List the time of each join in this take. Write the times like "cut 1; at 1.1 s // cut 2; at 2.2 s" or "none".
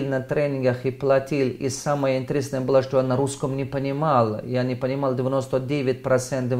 none